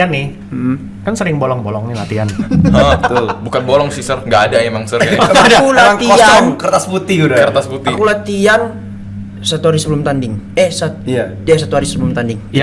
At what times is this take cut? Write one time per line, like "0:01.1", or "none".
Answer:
none